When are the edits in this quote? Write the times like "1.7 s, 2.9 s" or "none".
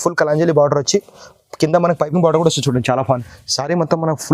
3.1 s